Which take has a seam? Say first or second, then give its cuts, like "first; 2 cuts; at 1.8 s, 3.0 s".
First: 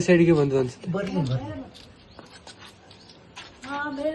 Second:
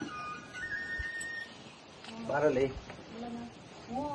first; 1 cut; at 2.0 s